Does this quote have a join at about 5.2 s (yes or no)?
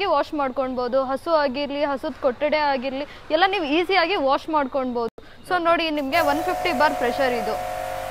no